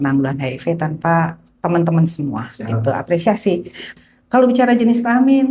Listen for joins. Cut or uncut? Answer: cut